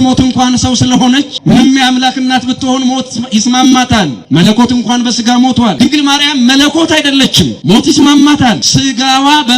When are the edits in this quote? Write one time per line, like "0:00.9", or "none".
0:01.3
0:04.2
0:05.7
0:07.6
0:08.7